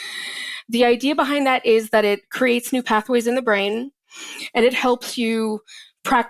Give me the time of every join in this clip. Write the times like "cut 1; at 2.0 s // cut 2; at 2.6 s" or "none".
none